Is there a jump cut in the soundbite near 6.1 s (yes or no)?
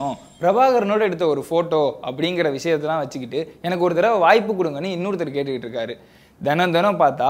no